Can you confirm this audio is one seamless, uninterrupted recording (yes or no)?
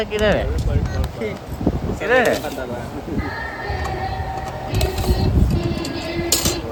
yes